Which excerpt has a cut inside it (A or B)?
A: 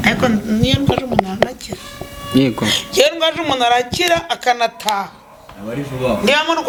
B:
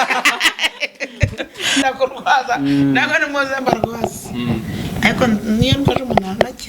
B